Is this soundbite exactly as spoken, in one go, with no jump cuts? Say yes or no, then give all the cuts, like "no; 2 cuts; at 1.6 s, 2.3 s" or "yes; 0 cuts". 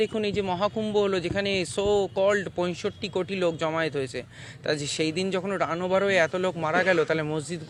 yes; 0 cuts